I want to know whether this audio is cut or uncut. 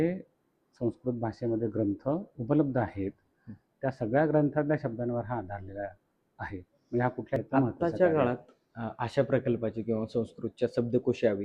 cut